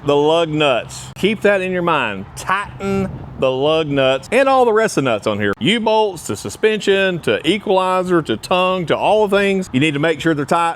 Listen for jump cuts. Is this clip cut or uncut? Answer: cut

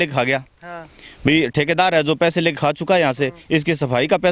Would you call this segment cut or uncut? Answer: uncut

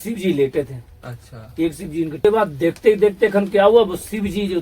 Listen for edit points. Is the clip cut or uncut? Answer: cut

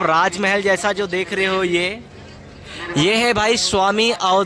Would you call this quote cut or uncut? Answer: uncut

